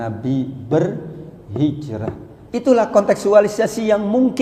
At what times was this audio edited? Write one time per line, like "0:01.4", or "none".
0:02.3